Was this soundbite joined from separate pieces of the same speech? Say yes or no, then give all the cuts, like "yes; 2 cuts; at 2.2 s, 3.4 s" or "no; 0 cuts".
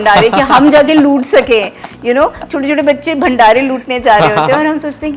no; 0 cuts